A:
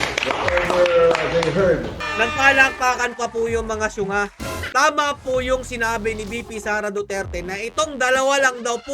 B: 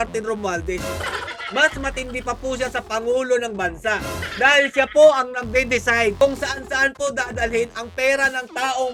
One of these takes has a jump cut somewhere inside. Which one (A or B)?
A